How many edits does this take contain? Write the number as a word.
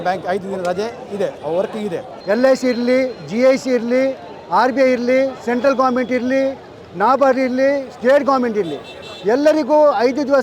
one